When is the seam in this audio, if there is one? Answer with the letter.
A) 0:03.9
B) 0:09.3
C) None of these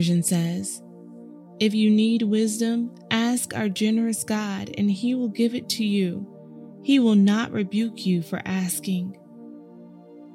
B